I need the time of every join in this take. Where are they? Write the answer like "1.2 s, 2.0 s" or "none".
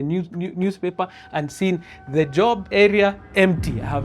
2.7 s